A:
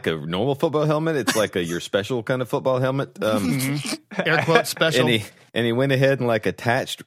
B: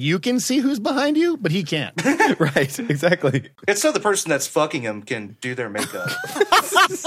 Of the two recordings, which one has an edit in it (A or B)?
B